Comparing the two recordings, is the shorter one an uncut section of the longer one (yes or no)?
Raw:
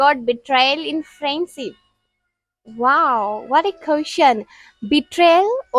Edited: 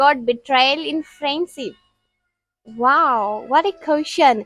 yes